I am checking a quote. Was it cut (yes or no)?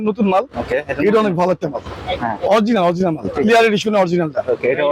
no